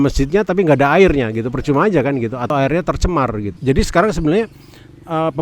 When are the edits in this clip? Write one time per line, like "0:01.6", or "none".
0:02.4
0:03.5